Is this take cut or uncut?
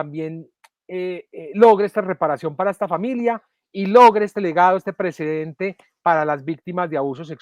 uncut